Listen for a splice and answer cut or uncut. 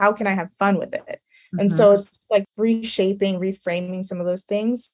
cut